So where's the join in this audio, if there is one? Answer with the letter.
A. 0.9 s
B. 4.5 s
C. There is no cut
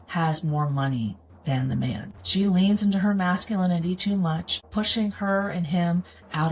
B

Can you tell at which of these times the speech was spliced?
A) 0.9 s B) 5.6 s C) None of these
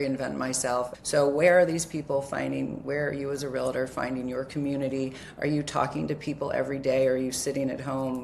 A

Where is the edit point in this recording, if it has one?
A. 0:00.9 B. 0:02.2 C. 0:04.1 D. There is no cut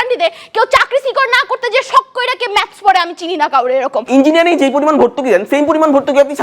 C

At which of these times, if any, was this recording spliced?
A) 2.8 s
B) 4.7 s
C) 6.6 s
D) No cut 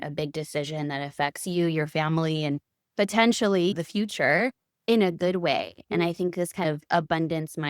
C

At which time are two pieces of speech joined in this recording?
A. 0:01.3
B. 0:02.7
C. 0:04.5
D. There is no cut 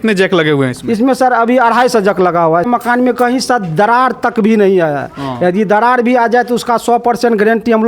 B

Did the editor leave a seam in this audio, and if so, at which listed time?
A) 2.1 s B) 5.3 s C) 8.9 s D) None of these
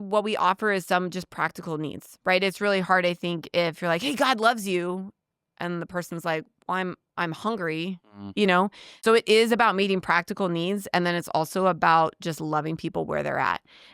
C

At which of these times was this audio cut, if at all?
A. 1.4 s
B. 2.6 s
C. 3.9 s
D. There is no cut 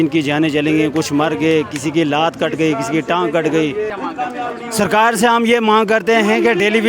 C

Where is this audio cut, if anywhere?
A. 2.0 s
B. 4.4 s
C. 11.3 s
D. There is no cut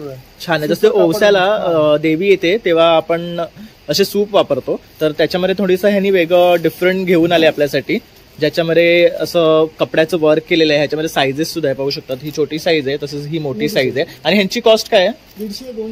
D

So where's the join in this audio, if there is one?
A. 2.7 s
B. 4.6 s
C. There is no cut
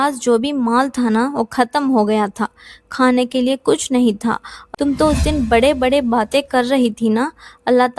B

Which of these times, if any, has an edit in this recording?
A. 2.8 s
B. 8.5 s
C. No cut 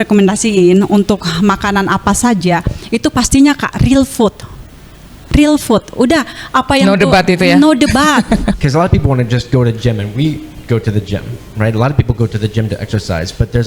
B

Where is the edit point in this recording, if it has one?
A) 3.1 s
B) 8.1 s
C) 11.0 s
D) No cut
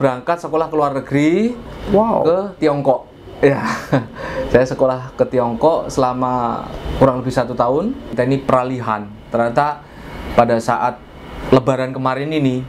B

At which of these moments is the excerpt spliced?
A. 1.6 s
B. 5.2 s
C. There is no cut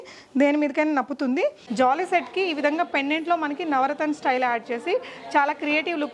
A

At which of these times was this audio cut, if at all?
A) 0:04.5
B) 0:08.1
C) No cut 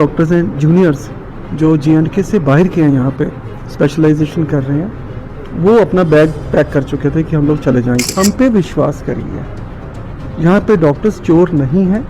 B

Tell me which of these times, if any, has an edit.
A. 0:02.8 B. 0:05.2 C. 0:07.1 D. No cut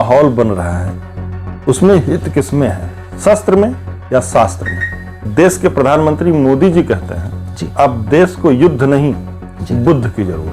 B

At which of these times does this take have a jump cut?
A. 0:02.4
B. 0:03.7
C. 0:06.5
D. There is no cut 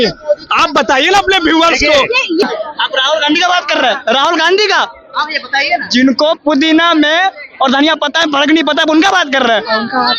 A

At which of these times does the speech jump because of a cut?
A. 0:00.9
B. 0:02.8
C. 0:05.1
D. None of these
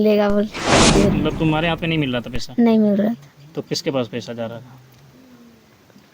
A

